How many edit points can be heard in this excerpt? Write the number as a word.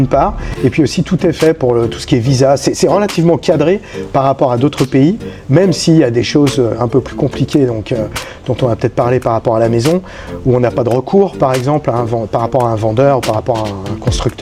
zero